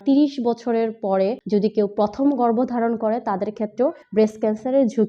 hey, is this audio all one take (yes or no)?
no